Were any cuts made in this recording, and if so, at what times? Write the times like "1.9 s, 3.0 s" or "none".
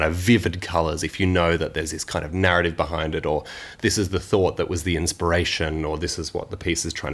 none